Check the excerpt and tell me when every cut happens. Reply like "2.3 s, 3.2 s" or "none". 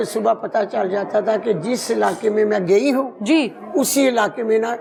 none